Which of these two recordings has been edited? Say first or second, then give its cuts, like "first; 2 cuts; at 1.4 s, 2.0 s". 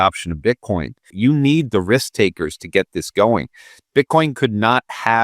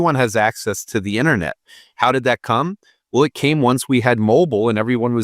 first; 1 cut; at 1.1 s